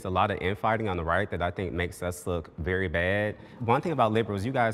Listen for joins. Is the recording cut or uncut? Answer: cut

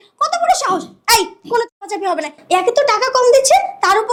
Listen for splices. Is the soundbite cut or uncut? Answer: uncut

